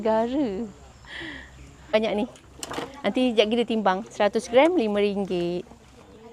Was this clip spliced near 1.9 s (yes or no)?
yes